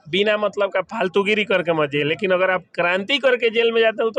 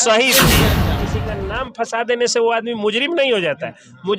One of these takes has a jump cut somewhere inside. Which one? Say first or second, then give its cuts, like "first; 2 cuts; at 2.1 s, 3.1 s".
second; 1 cut; at 1.0 s